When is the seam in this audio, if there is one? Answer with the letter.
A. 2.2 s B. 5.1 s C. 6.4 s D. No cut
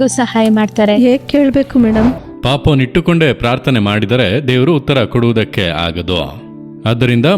A